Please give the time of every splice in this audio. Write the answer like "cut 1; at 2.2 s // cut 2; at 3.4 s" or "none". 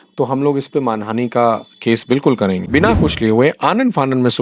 cut 1; at 2.6 s

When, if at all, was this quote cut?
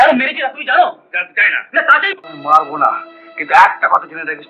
cut 1; at 2.3 s

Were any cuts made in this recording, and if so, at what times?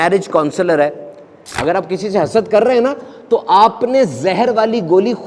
cut 1; at 1.4 s

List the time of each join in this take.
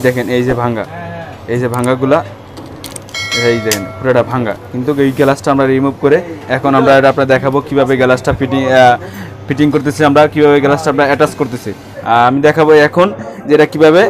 none

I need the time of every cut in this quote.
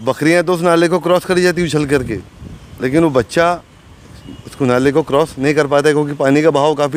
none

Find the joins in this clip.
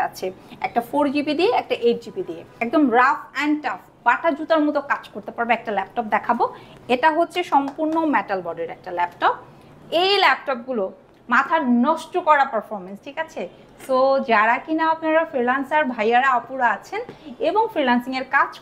cut 1; at 2.5 s // cut 2; at 9.7 s

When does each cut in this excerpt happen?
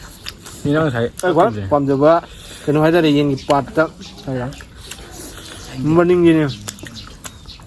none

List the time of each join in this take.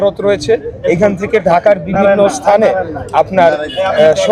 none

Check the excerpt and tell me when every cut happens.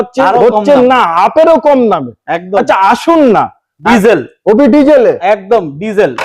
cut 1; at 3.8 s

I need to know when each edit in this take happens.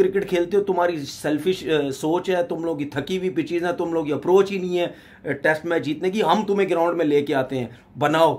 none

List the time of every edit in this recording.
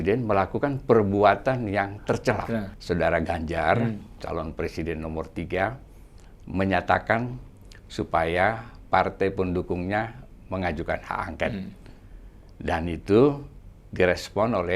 cut 1; at 2.7 s // cut 2; at 4.1 s

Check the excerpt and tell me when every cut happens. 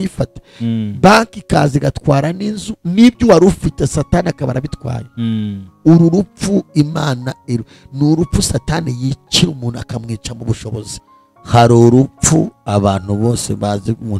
cut 1; at 11.0 s

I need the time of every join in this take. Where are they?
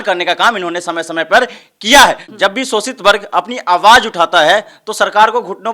cut 1; at 2.3 s

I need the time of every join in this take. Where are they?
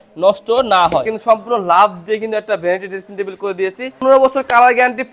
cut 1; at 1.1 s // cut 2; at 4.0 s

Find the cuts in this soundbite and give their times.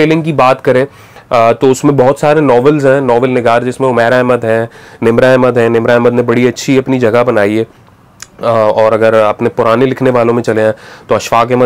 none

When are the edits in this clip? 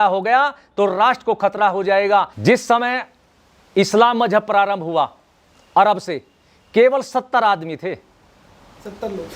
cut 1; at 2.3 s

